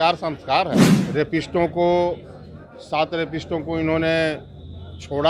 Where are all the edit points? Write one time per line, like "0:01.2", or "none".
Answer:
0:01.0